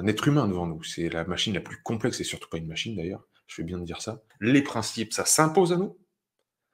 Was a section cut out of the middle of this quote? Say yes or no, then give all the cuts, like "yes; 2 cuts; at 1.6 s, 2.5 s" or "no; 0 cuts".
yes; 1 cut; at 4.2 s